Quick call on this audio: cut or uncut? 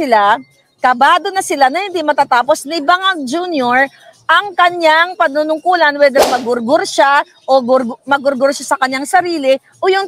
uncut